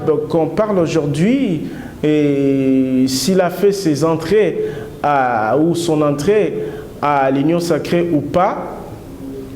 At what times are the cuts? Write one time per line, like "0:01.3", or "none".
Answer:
none